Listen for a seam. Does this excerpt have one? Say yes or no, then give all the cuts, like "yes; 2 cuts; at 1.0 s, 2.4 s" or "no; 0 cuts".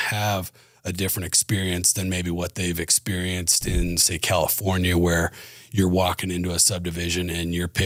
no; 0 cuts